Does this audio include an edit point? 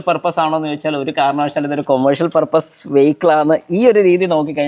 no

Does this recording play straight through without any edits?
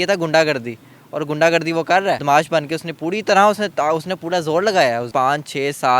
no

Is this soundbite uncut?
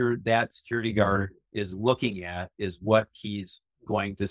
yes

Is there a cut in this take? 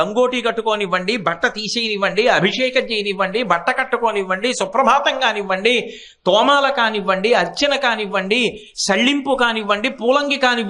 no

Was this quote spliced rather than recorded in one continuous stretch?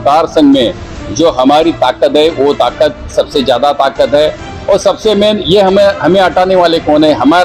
no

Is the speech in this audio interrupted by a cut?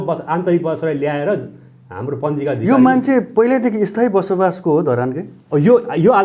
no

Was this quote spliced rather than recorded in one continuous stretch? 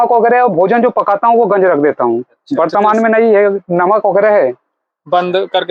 no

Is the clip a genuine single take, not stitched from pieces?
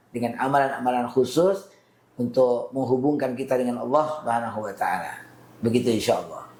yes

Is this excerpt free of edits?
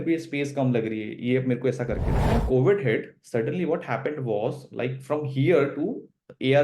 no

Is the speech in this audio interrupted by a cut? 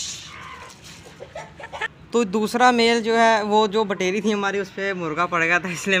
no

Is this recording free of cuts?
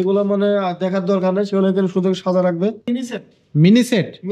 no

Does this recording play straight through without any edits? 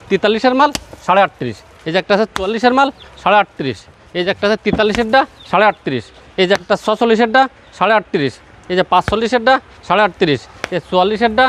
yes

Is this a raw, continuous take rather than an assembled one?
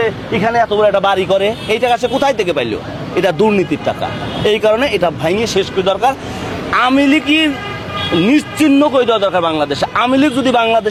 yes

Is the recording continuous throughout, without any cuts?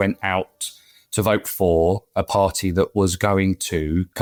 yes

